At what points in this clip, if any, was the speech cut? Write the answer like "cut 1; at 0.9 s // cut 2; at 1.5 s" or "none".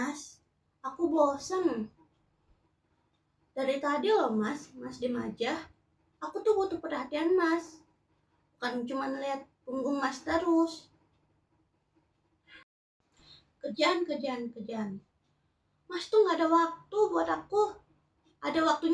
none